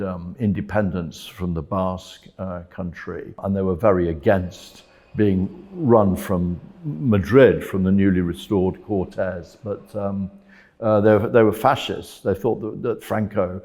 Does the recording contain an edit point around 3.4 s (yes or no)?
yes